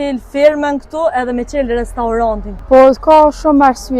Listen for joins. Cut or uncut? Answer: cut